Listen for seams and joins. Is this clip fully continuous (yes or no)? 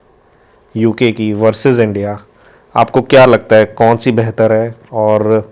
yes